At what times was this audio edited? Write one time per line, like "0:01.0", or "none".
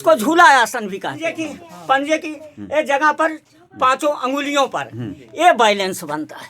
0:01.3